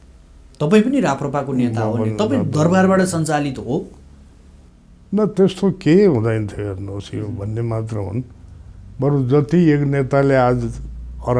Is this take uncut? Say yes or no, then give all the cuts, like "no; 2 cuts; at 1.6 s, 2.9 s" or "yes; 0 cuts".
yes; 0 cuts